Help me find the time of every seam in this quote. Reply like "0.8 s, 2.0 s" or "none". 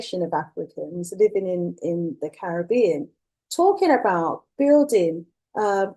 none

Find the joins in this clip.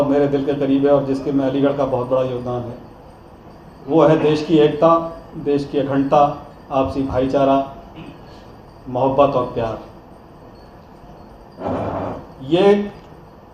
none

